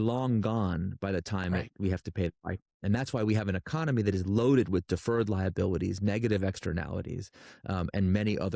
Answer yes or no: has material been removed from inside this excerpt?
no